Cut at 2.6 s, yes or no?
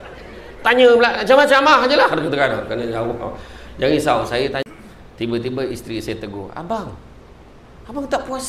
no